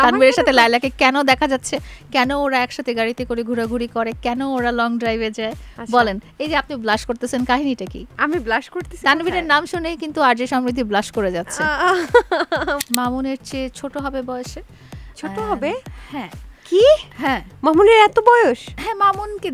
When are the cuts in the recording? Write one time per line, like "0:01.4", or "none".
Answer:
0:12.8